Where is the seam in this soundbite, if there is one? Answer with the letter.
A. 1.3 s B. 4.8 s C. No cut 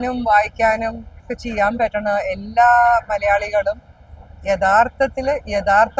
A